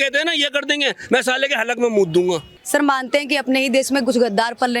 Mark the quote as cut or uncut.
cut